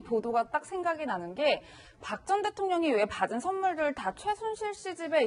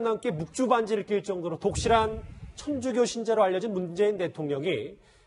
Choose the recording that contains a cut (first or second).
first